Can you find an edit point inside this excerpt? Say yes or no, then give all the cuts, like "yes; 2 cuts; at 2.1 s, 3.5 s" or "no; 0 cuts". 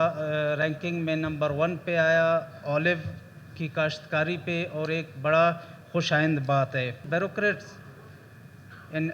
yes; 1 cut; at 7.0 s